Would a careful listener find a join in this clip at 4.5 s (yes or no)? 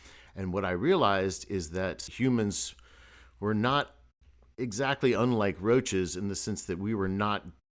no